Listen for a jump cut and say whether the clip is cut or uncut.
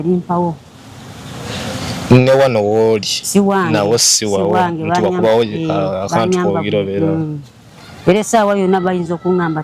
uncut